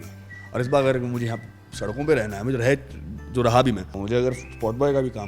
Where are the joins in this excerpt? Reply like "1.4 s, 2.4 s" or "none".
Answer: 4.0 s